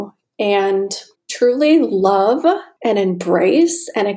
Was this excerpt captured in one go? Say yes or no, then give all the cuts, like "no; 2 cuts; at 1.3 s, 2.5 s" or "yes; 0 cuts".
no; 2 cuts; at 1.3 s, 2.7 s